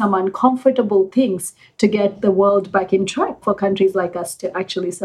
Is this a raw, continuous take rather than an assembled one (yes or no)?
no